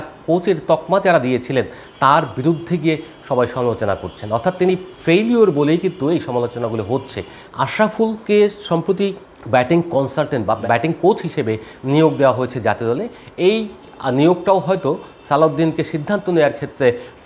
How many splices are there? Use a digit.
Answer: 2